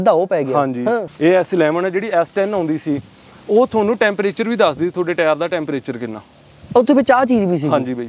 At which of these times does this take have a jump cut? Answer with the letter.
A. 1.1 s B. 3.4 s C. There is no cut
A